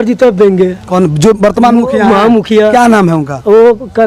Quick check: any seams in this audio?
no; 0 cuts

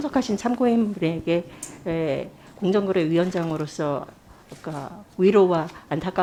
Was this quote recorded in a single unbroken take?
yes; 0 cuts

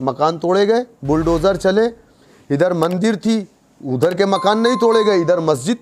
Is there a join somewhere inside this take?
no; 0 cuts

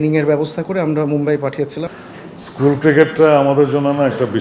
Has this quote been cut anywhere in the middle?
yes; 1 cut; at 1.9 s

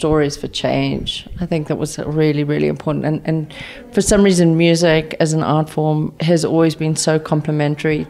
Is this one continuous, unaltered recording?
yes; 0 cuts

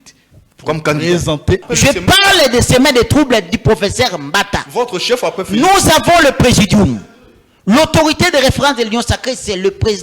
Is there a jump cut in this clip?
yes; 1 cut; at 1.7 s

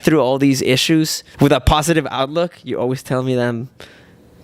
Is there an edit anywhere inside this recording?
yes; 1 cut; at 1.2 s

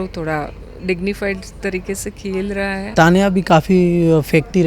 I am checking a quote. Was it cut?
yes; 1 cut; at 2.9 s

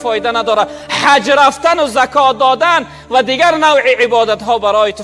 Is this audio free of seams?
yes; 0 cuts

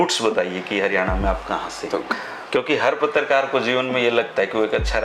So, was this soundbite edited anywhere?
yes; 1 cut; at 2.1 s

